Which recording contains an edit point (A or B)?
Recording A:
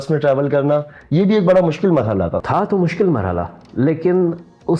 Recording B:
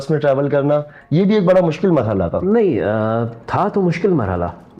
A